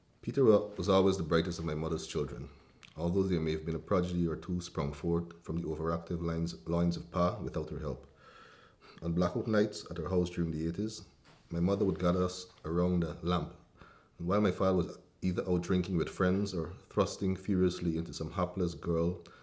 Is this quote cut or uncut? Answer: uncut